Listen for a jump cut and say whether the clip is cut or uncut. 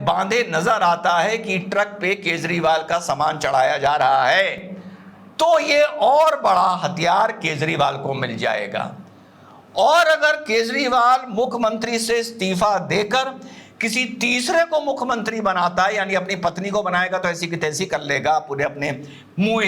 uncut